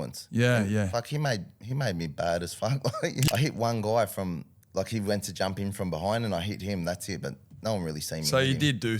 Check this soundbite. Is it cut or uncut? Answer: cut